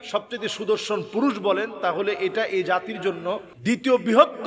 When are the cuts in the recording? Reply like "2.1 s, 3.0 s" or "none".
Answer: 3.5 s